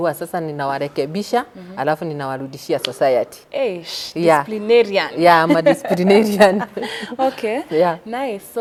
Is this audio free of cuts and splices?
yes; 0 cuts

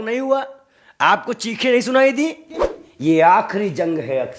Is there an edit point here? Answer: yes; 1 cut; at 2.8 s

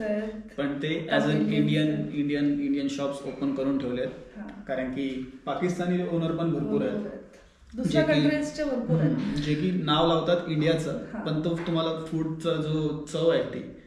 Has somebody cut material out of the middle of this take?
no; 0 cuts

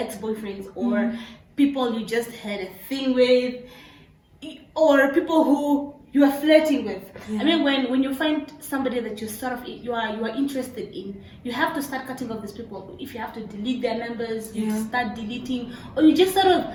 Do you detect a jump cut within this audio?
no; 0 cuts

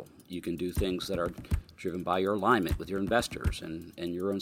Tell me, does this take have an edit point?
no; 0 cuts

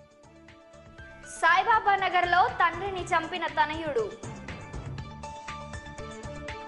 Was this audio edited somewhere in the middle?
no; 0 cuts

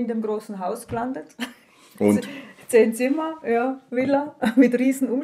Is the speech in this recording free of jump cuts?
yes; 0 cuts

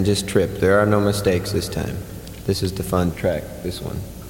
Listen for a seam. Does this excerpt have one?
yes; 1 cut; at 3.1 s

